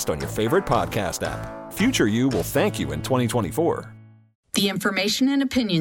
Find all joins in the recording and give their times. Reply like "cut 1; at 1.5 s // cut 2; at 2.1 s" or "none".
cut 1; at 4.8 s